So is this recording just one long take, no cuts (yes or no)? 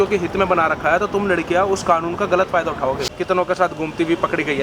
no